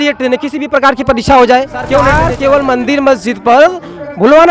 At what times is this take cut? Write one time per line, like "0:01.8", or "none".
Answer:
0:02.2